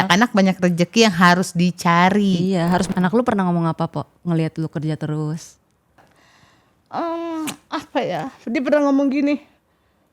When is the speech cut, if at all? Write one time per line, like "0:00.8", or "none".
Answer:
0:02.9
0:06.0

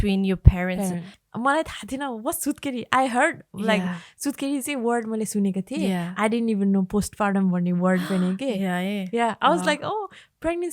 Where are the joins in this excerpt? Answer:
0:01.1

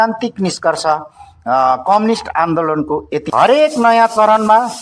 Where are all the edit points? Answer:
0:03.3

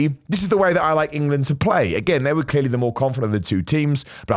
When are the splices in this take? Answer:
none

